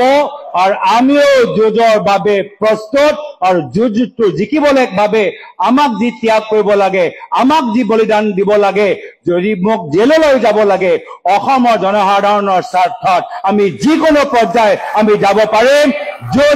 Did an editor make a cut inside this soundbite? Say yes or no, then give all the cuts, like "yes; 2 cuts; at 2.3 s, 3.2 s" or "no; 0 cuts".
no; 0 cuts